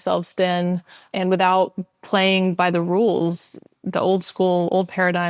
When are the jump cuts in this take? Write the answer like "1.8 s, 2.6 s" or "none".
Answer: 1.0 s